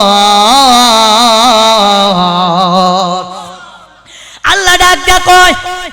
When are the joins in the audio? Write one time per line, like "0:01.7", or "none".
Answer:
none